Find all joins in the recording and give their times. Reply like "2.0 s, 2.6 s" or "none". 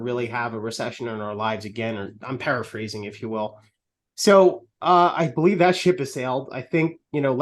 none